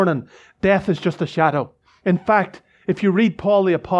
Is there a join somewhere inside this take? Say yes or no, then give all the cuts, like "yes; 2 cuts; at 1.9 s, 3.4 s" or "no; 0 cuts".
yes; 1 cut; at 1.8 s